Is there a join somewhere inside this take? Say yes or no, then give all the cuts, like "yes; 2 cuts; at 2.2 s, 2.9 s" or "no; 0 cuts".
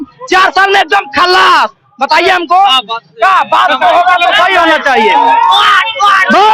no; 0 cuts